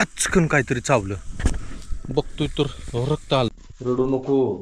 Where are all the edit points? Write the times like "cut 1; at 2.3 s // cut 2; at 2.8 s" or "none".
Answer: cut 1; at 3.7 s